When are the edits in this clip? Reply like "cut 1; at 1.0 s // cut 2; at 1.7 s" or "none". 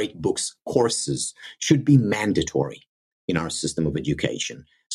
none